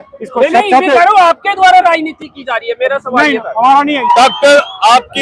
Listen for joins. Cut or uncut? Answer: cut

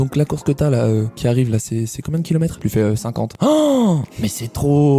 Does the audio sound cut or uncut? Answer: uncut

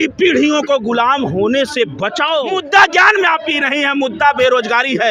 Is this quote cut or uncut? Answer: cut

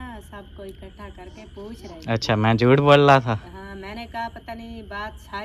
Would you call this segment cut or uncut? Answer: uncut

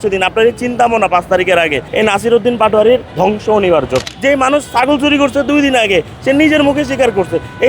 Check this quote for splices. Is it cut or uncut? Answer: cut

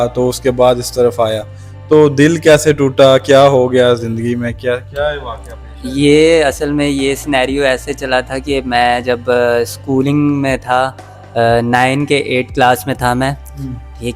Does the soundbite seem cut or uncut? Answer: uncut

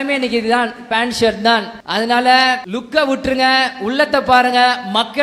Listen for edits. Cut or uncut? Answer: cut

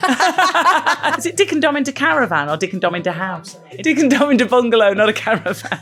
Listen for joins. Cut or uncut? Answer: cut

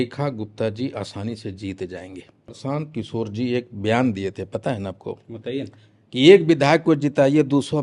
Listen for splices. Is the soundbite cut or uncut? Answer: cut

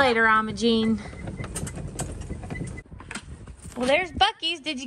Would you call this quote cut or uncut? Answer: cut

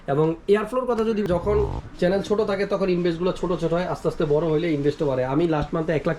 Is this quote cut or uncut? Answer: cut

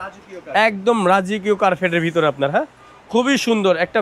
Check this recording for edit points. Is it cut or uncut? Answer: uncut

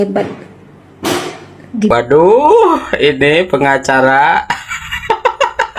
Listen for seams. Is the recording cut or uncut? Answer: cut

